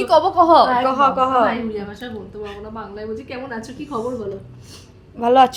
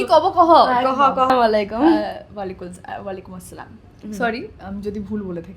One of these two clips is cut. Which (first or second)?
second